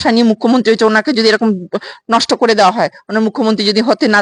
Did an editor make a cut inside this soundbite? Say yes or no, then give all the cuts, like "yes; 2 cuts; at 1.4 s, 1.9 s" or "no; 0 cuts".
no; 0 cuts